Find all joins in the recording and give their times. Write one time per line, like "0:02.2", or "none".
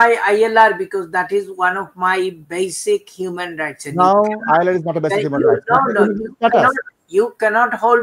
none